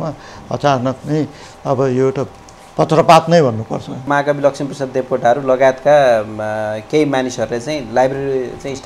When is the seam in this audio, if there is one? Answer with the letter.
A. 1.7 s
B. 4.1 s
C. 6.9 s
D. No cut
B